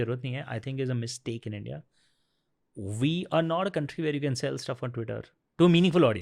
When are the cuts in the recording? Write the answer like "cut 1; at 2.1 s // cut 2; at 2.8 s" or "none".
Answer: none